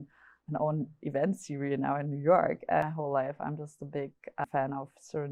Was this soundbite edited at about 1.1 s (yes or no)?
no